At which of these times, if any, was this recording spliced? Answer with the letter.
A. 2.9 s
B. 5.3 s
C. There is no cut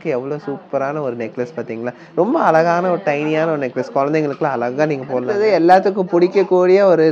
B